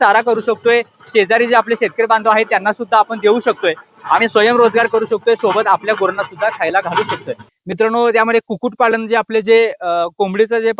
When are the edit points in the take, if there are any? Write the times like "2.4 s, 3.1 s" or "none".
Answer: 7.5 s